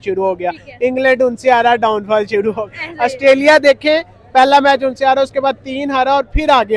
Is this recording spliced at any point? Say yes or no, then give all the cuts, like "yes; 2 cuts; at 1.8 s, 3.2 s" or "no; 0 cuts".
no; 0 cuts